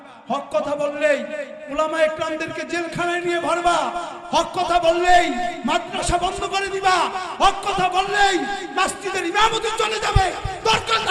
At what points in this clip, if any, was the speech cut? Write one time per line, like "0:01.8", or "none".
none